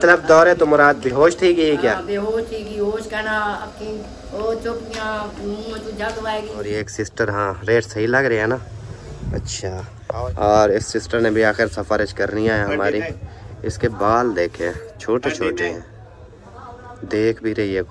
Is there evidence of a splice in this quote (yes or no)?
yes